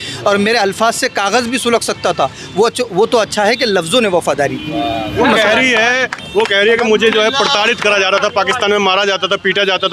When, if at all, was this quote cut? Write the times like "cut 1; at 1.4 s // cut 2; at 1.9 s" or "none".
none